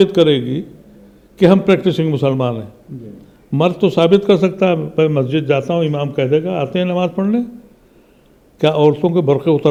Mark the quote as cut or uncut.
uncut